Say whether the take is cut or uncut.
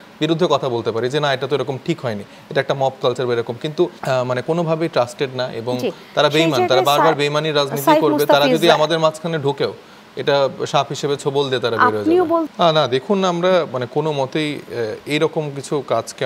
cut